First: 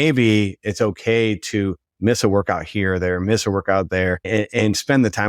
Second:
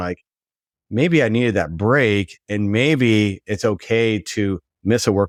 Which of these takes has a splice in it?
first; 1 cut; at 4.3 s

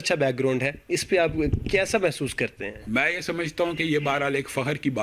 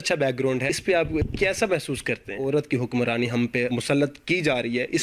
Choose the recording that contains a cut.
second; 3 cuts; at 1.0 s, 2.4 s, 3.7 s

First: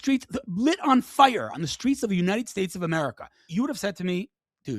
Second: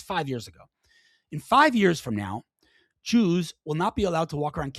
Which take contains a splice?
first; 1 cut; at 3.2 s

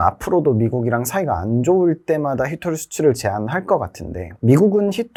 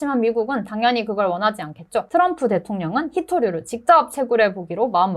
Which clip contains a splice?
second; 1 cut; at 2.1 s

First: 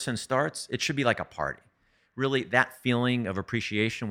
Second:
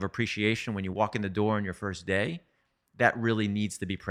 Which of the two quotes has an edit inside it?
first; 1 cut; at 2.0 s

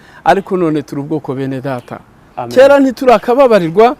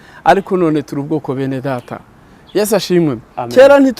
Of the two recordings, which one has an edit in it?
first; 1 cut; at 2.3 s

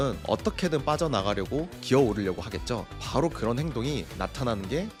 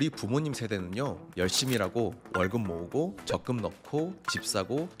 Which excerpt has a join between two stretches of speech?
second; 1 cut; at 1.2 s

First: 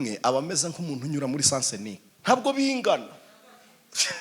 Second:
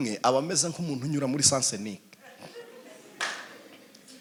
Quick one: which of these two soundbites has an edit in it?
first; 1 cut; at 2.1 s

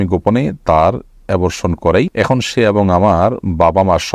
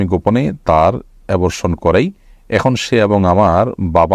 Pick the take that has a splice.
first; 1 cut; at 2.1 s

